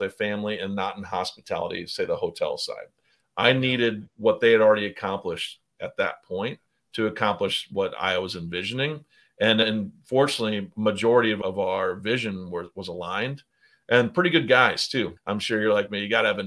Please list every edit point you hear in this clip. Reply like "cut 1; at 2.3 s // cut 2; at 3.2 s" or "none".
cut 1; at 7.7 s // cut 2; at 9.6 s // cut 3; at 11.4 s // cut 4; at 15.2 s